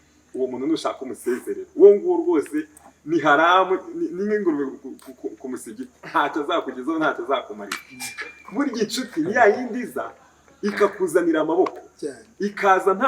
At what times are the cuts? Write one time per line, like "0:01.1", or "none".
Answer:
none